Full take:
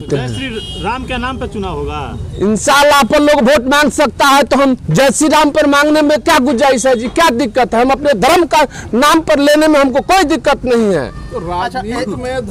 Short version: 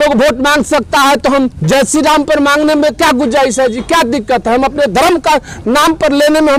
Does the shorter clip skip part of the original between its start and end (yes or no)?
no